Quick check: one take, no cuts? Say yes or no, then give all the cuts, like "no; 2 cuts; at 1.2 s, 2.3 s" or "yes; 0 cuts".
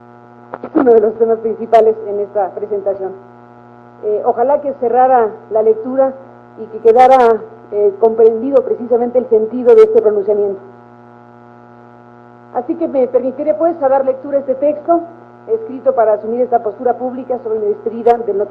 yes; 0 cuts